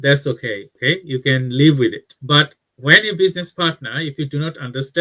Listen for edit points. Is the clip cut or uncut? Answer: cut